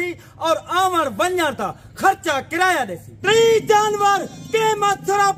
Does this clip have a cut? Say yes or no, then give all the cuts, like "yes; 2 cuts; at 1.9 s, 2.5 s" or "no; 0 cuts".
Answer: yes; 1 cut; at 3.1 s